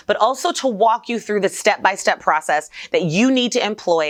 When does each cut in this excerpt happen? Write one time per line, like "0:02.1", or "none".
none